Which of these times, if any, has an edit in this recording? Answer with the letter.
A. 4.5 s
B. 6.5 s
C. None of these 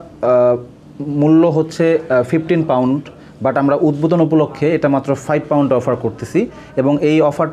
C